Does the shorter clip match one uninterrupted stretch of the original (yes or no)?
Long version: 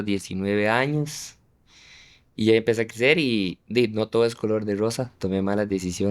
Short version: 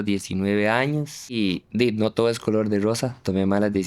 no